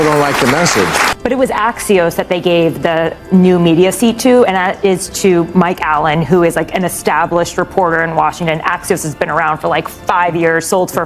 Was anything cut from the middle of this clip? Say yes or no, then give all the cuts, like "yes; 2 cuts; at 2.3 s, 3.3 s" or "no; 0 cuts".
yes; 1 cut; at 1.1 s